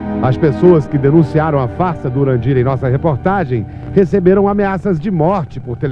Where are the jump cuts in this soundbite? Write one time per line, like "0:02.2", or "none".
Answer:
none